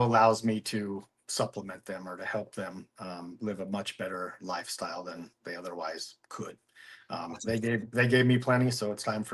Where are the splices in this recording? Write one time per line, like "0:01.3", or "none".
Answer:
none

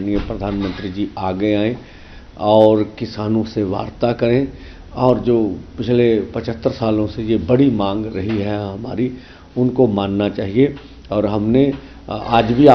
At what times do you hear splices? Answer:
none

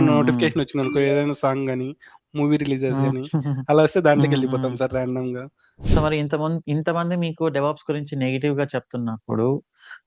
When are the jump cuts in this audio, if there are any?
0:05.8

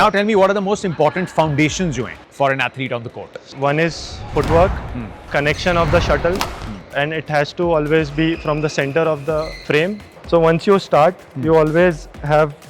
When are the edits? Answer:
0:02.2
0:03.4
0:05.2
0:10.1

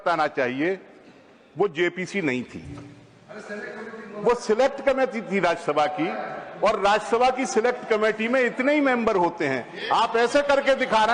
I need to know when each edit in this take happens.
none

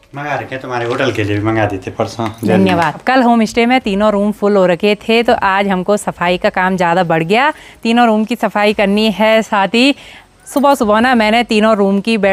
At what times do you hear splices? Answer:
none

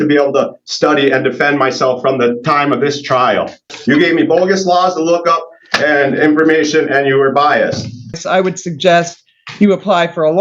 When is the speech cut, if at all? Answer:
0:03.7
0:08.2

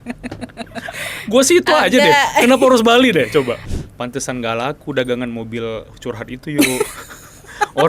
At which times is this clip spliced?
0:03.7

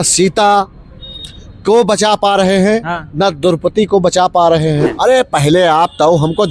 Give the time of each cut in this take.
0:04.9

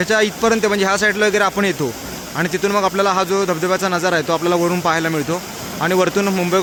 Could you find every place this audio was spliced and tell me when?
none

